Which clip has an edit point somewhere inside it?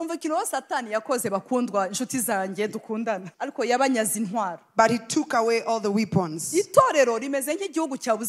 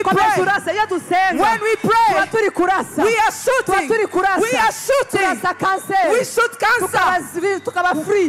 first; 1 cut; at 3.3 s

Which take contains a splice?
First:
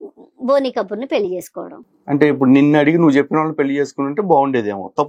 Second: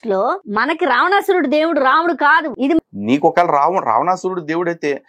second; 1 cut; at 2.9 s

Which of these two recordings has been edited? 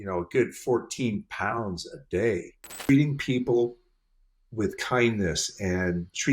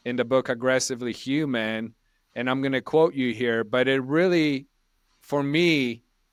first; 1 cut; at 2.8 s

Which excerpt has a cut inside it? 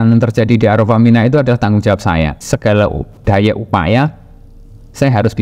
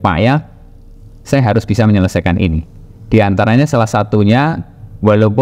first; 1 cut; at 2.4 s

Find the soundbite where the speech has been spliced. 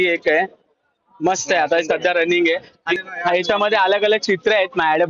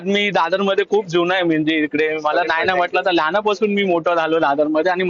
first; 1 cut; at 2.8 s

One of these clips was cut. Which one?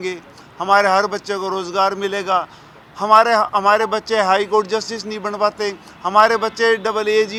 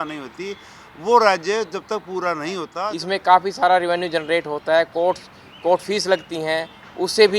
second; 1 cut; at 2.7 s

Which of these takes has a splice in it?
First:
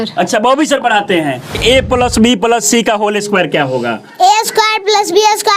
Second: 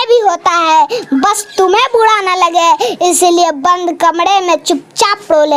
first; 1 cut; at 1.6 s

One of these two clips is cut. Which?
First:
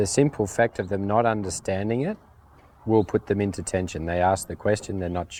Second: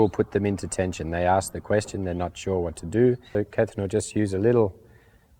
second; 1 cut; at 3.4 s

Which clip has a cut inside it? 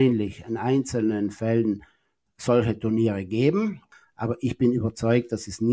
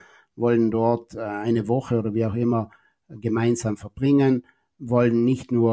first; 1 cut; at 3.9 s

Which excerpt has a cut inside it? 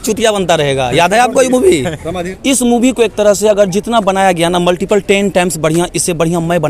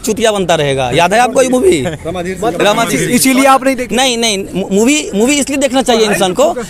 first; 1 cut; at 2.3 s

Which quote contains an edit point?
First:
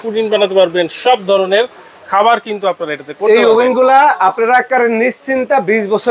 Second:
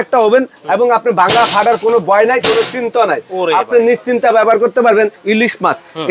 second; 1 cut; at 5.2 s

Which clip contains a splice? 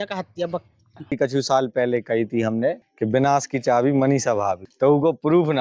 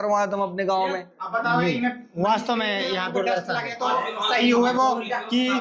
first; 3 cuts; at 0.9 s, 2.9 s, 4.7 s

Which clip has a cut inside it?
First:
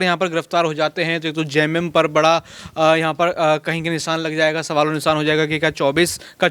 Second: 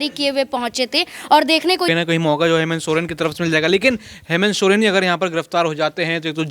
second; 1 cut; at 1.8 s

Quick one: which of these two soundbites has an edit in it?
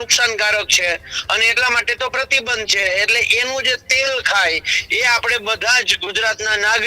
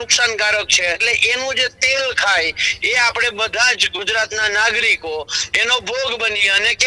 second; 1 cut; at 1.0 s

